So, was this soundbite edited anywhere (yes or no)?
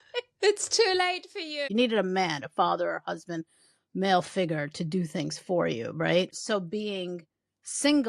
yes